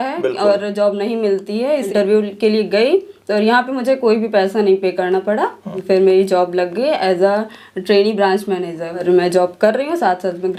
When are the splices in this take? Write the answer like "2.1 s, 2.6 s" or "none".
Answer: 1.9 s, 5.8 s, 9.0 s